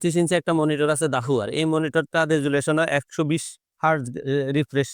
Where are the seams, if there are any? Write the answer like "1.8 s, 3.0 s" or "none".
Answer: none